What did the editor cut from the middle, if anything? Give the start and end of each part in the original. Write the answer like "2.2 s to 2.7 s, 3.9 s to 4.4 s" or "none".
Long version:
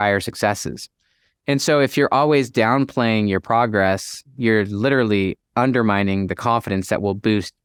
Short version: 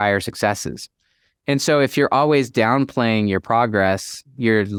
none